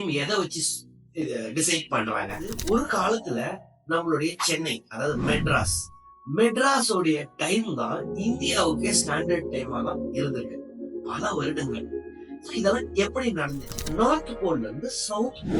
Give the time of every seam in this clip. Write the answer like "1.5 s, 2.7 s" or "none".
2.5 s, 13.7 s